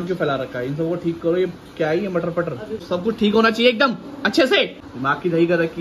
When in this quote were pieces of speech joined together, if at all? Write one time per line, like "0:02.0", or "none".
0:02.8
0:04.7